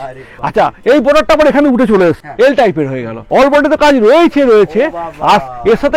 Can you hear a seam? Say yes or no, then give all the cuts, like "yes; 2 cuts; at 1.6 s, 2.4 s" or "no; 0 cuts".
yes; 2 cuts; at 2.3 s, 3.2 s